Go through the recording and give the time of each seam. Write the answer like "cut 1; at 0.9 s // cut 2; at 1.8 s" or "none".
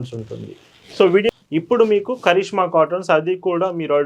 cut 1; at 1.3 s